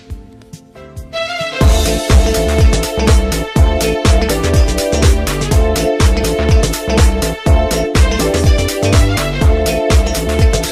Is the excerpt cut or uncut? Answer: uncut